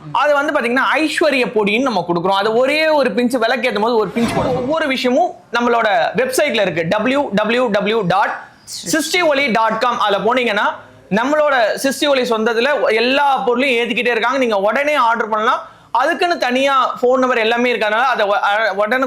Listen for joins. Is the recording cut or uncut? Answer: cut